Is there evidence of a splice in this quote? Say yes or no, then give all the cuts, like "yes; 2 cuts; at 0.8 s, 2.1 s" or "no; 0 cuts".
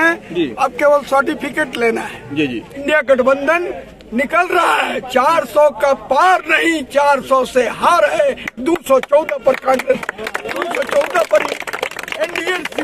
yes; 1 cut; at 2.7 s